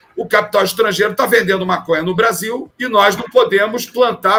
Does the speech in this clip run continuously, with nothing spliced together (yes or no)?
yes